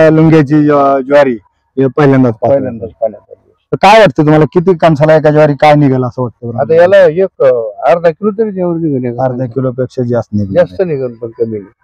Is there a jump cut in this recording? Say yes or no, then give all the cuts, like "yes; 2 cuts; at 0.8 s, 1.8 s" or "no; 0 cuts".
no; 0 cuts